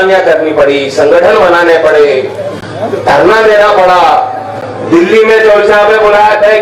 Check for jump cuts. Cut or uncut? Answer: uncut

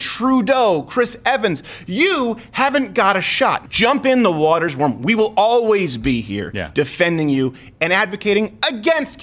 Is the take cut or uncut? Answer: cut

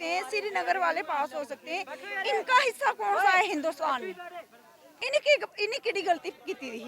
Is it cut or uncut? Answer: cut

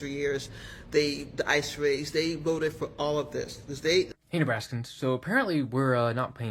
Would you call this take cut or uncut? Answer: cut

